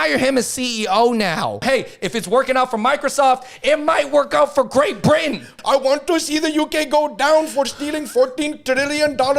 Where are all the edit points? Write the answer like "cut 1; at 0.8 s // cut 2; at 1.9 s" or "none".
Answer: cut 1; at 1.6 s // cut 2; at 5.5 s